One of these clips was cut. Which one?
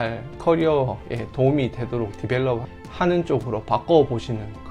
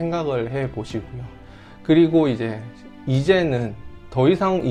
first; 1 cut; at 2.8 s

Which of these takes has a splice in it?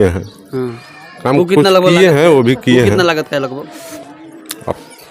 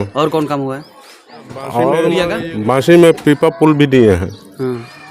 second; 1 cut; at 2.3 s

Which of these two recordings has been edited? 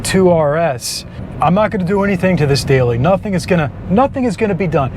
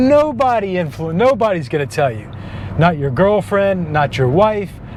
first; 1 cut; at 1.2 s

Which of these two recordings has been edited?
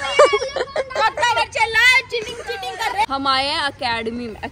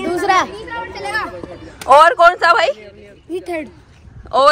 first; 1 cut; at 3.1 s

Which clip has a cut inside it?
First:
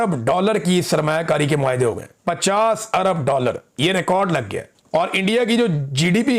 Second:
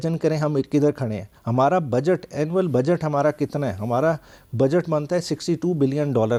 first; 1 cut; at 4.7 s

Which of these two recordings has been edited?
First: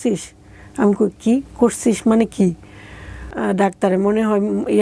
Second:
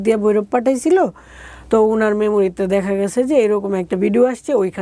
first; 1 cut; at 3.3 s

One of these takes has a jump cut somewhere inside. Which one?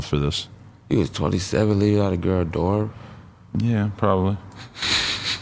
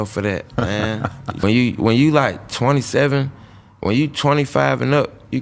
second; 1 cut; at 1.4 s

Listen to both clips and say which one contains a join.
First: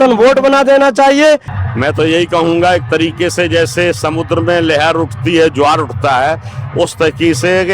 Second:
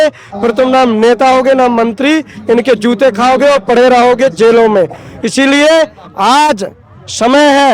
first; 1 cut; at 1.5 s

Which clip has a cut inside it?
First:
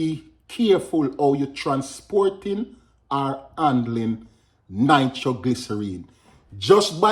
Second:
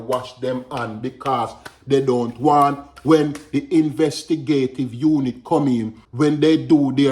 second; 1 cut; at 6.0 s

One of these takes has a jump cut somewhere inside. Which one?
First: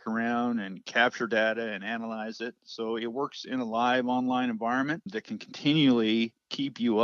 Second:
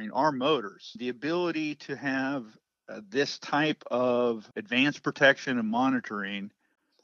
second; 2 cuts; at 0.9 s, 4.5 s

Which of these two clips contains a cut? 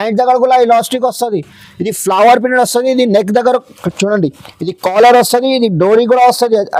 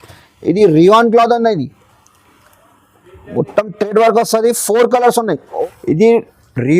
second; 1 cut; at 5.5 s

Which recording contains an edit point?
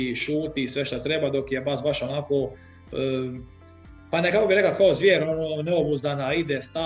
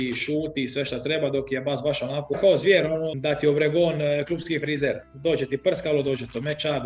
second; 3 cuts; at 2.3 s, 3.1 s, 5.1 s

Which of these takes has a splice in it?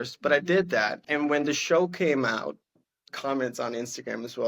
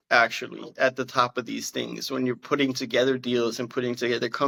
first; 2 cuts; at 1.0 s, 3.1 s

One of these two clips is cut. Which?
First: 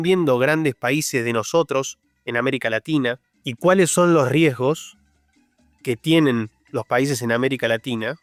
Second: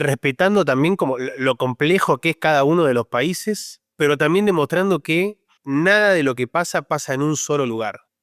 second; 1 cut; at 5.5 s

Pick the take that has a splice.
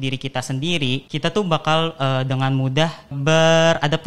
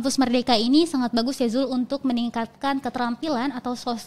first; 2 cuts; at 1.1 s, 3.2 s

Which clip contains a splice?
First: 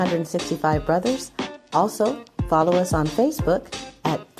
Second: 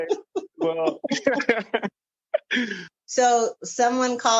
second; 1 cut; at 2.9 s

